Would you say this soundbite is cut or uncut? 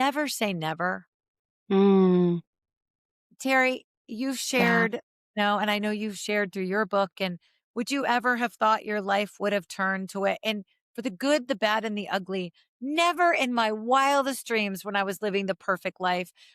uncut